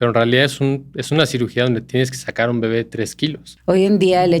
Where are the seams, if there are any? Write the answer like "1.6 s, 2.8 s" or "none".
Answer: 3.5 s

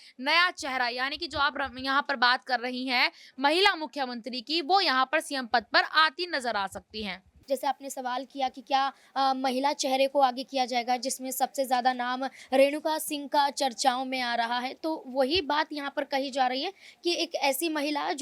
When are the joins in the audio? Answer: 7.3 s

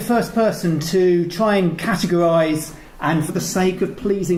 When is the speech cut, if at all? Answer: none

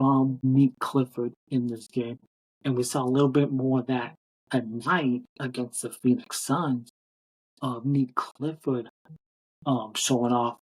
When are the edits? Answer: 2.3 s

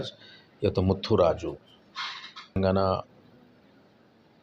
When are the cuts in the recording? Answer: 2.6 s

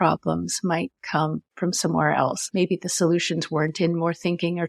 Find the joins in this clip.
1.5 s, 2.4 s

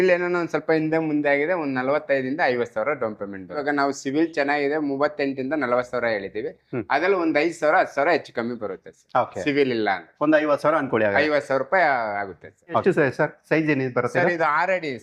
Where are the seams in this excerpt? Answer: 3.6 s, 12.8 s

